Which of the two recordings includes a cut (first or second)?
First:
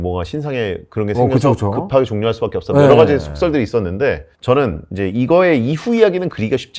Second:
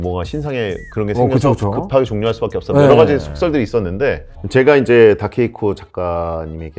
second